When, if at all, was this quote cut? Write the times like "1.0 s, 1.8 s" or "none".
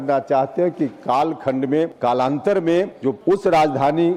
1.9 s, 3.0 s